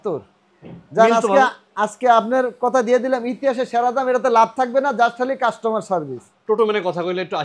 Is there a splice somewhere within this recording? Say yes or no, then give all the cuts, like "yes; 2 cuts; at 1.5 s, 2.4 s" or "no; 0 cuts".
yes; 1 cut; at 6.3 s